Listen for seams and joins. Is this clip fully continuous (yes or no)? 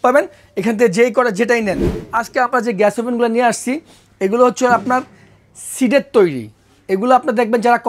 no